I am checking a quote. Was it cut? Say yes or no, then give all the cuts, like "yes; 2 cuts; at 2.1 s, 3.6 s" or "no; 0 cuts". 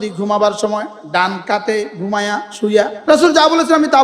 yes; 1 cut; at 3.0 s